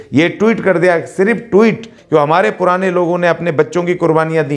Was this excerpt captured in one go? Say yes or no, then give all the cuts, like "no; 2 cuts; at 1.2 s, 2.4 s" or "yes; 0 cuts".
no; 1 cut; at 1.9 s